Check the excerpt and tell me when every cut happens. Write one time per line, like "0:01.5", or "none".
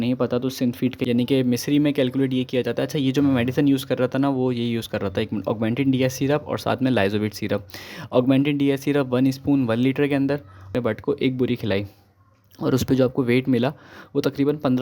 0:01.0
0:10.7